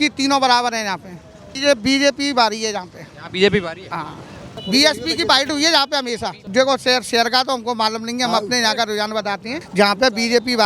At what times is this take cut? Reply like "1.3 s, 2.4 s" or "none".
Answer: 1.5 s, 4.5 s, 6.4 s, 9.6 s